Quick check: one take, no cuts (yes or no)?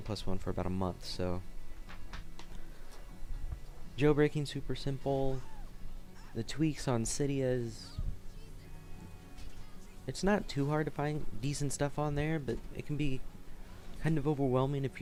yes